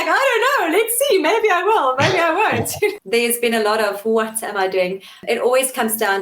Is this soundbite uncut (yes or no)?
no